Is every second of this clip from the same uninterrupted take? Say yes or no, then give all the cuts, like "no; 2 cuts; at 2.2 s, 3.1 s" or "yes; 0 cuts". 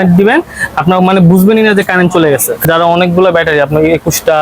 no; 1 cut; at 2.6 s